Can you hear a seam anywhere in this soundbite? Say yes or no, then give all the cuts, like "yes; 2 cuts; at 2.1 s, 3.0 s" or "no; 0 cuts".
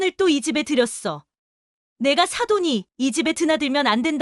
no; 0 cuts